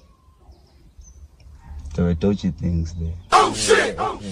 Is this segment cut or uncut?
uncut